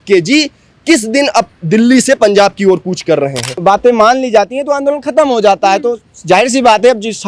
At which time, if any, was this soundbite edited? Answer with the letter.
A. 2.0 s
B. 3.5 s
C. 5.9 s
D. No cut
B